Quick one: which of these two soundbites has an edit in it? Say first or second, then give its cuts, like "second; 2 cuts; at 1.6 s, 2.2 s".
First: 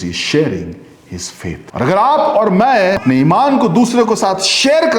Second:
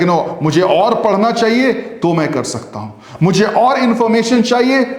first; 2 cuts; at 1.6 s, 3.0 s